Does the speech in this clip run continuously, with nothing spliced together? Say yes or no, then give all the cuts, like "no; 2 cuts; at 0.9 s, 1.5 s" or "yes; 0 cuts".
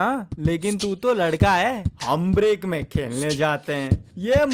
yes; 0 cuts